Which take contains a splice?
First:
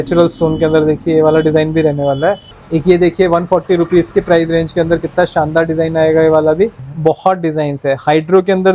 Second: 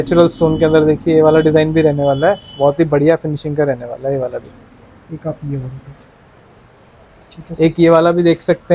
first; 2 cuts; at 2.5 s, 6.9 s

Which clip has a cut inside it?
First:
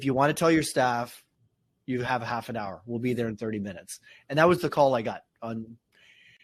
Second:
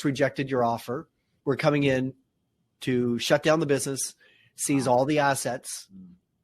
second; 1 cut; at 1.3 s

